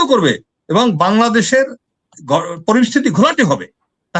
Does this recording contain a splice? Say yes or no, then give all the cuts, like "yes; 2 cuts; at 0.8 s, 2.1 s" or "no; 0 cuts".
no; 0 cuts